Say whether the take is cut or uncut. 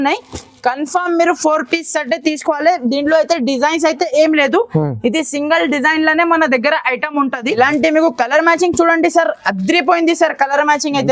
cut